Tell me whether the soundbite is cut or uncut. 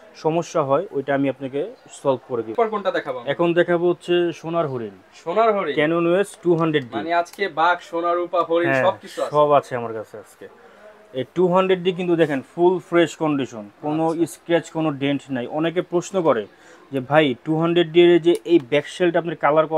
uncut